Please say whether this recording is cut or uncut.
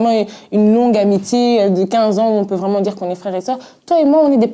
cut